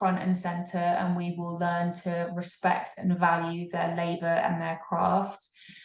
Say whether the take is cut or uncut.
uncut